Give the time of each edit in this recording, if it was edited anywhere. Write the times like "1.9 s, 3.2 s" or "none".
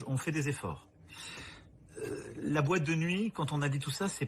1.2 s